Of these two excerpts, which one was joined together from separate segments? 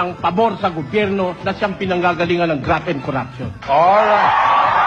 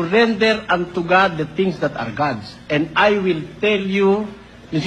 second; 1 cut; at 1.9 s

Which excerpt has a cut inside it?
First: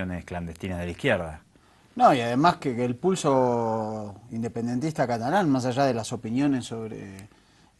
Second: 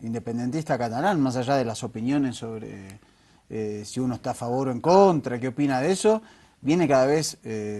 first; 1 cut; at 1.5 s

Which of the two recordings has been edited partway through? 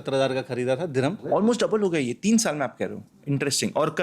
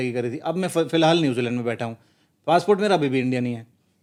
first; 1 cut; at 1.2 s

